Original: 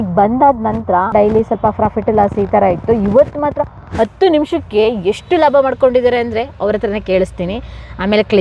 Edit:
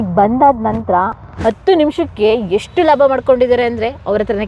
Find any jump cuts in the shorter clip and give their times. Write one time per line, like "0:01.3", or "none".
0:01.1